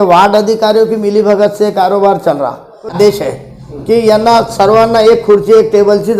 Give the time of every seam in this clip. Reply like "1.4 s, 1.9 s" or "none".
3.0 s